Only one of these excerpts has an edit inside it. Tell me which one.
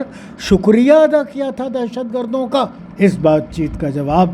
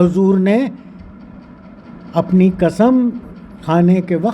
first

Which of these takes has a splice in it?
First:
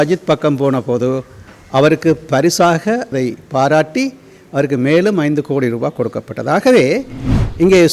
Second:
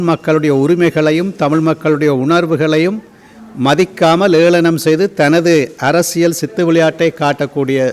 first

